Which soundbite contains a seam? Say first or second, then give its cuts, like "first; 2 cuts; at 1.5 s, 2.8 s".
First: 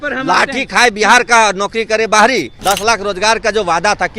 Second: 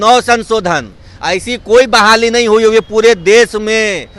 first; 1 cut; at 2.5 s